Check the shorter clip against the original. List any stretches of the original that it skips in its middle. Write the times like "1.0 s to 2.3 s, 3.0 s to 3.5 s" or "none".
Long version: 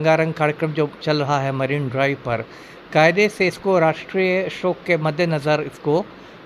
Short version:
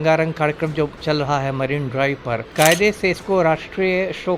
2.5 s to 2.8 s